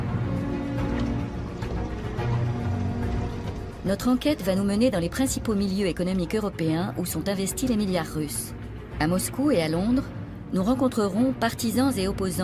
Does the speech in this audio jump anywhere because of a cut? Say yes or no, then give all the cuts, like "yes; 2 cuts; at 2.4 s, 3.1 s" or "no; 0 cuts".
yes; 1 cut; at 7.1 s